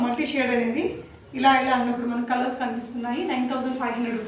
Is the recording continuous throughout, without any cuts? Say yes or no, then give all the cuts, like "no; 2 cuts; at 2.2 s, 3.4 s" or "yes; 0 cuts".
yes; 0 cuts